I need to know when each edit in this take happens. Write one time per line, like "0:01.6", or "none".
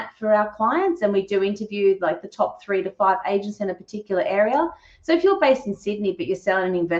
none

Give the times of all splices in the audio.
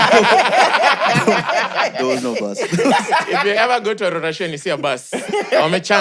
none

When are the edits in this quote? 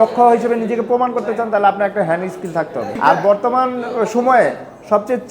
none

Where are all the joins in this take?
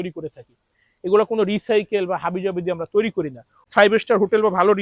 0:03.6

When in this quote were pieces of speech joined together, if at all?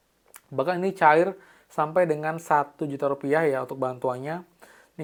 none

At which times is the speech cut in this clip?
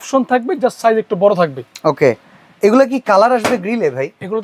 none

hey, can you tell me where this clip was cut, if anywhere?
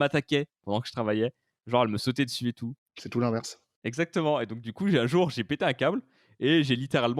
none

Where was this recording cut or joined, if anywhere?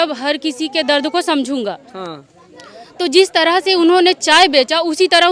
none

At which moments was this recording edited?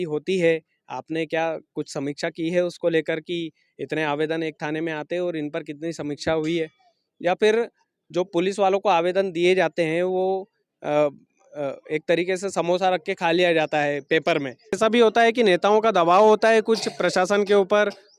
0:14.8

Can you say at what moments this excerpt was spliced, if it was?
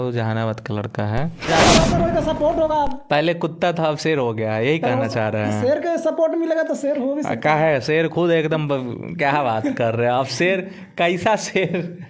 0:01.5

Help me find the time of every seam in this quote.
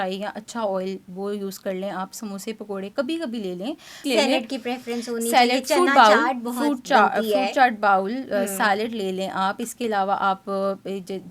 0:04.0

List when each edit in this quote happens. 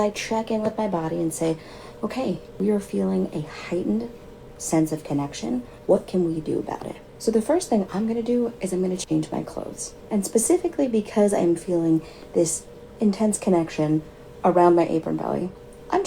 0:01.6
0:08.7

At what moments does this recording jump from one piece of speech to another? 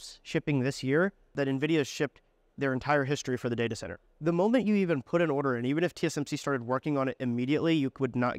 0:01.3
0:04.0

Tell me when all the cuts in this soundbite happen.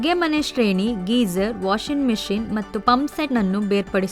0:02.9

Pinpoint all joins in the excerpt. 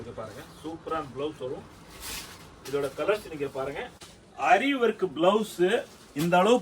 0:04.4

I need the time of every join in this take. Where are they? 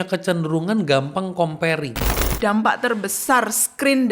0:02.2

